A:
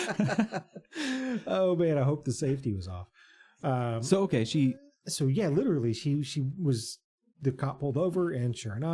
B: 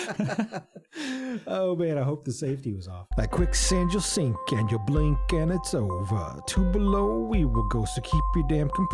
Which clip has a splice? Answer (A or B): B